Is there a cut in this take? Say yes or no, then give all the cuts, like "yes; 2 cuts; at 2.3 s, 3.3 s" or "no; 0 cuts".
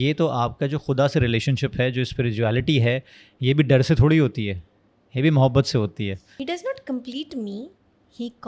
yes; 1 cut; at 6.3 s